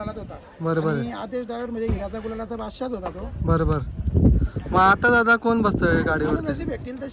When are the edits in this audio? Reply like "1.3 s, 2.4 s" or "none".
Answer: none